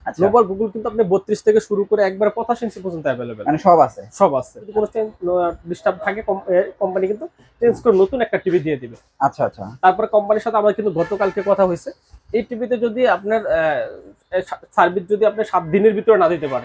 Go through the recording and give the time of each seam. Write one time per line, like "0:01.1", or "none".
0:04.7